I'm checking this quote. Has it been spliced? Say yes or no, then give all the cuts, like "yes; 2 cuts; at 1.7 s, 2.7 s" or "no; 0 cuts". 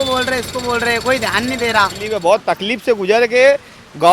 yes; 1 cut; at 2.0 s